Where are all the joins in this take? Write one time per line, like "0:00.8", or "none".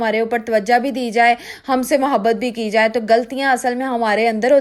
none